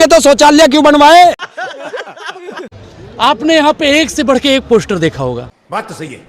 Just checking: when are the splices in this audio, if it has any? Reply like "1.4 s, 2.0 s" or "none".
1.5 s, 2.8 s